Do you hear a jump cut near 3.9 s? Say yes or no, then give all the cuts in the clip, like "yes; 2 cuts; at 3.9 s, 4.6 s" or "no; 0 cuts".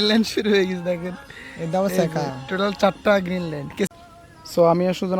yes; 1 cut; at 3.9 s